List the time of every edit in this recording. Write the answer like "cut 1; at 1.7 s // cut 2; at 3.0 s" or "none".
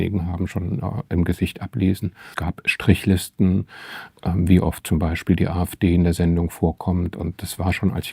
cut 1; at 2.3 s